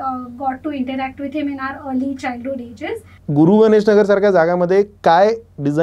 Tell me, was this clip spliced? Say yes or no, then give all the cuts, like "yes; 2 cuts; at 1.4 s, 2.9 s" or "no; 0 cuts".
yes; 1 cut; at 3.1 s